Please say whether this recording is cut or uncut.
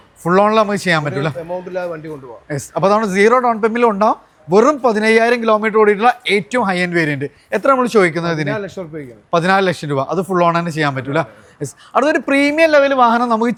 uncut